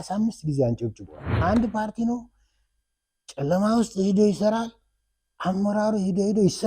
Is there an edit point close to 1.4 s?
yes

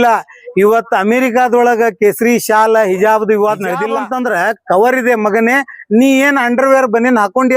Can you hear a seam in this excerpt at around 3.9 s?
yes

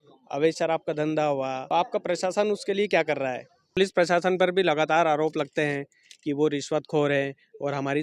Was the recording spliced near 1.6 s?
yes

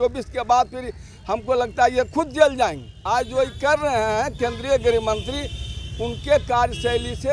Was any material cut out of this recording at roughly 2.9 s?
yes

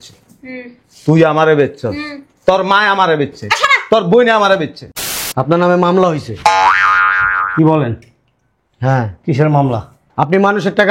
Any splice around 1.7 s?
no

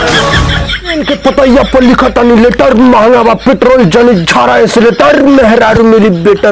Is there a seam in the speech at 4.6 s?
no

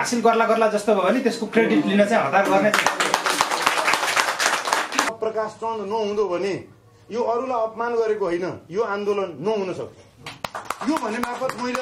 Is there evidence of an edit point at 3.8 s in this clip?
no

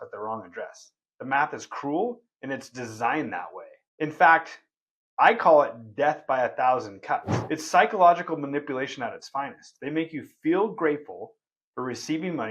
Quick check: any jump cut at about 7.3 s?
yes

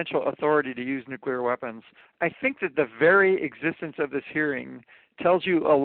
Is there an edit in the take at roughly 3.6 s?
no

